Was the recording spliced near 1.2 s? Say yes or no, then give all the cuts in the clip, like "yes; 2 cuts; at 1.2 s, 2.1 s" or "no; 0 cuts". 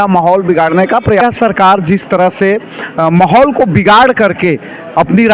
yes; 1 cut; at 1.2 s